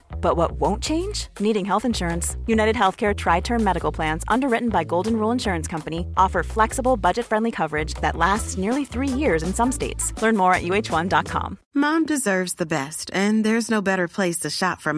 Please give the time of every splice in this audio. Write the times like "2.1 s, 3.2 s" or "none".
11.6 s

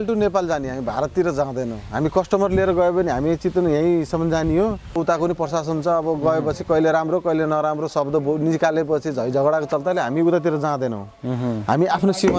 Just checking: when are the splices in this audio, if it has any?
5.0 s

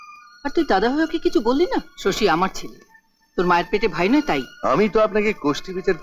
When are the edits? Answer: 1.9 s, 4.5 s

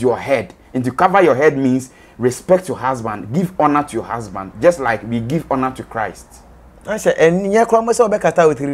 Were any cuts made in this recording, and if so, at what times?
none

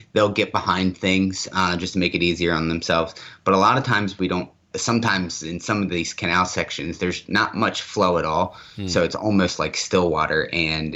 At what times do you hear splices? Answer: none

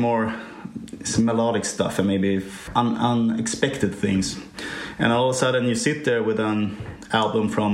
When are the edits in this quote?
2.6 s

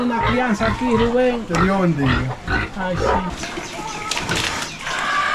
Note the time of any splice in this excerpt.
3.3 s

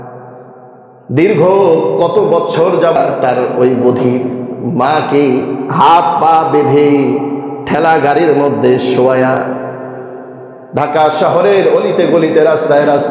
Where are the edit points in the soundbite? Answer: 3.0 s

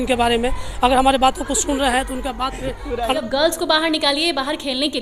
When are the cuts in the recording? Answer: 3.1 s

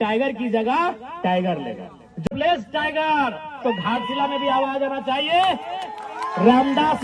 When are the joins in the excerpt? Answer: 2.3 s

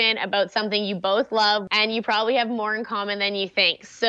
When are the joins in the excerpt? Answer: 1.6 s

